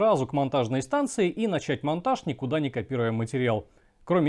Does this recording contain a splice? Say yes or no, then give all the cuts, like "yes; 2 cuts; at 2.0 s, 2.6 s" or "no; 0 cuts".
no; 0 cuts